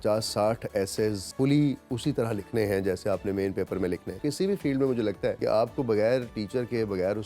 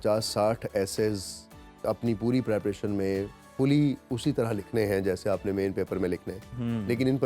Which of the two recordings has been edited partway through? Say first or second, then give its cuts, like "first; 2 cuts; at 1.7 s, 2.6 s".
first; 3 cuts; at 1.2 s, 4.1 s, 5.4 s